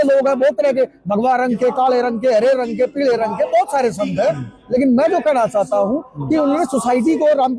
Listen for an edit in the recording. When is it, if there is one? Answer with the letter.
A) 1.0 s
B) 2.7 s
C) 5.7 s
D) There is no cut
D